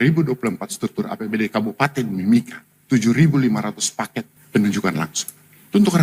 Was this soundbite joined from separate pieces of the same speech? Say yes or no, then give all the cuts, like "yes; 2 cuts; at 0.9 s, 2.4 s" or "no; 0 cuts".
no; 0 cuts